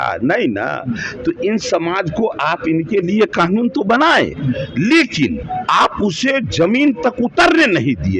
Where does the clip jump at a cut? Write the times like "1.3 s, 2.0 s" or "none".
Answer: 5.4 s